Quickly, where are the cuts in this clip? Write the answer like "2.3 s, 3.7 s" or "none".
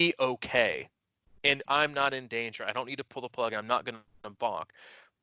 none